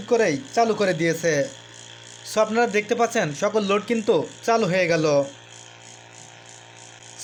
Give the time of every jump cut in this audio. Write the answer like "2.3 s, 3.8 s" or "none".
none